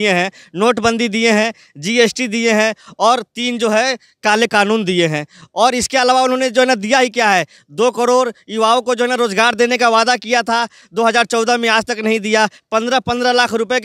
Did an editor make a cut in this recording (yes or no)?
no